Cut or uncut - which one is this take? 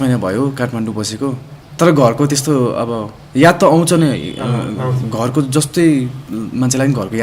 uncut